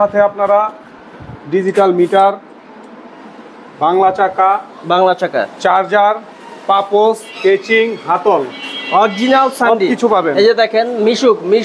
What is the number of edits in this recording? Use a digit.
0